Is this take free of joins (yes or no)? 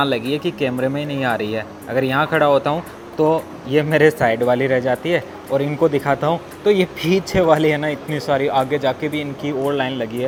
yes